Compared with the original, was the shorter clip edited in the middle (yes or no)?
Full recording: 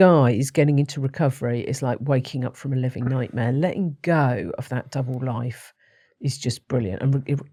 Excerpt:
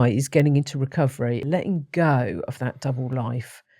yes